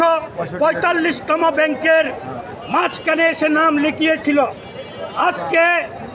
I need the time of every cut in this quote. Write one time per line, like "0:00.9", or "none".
none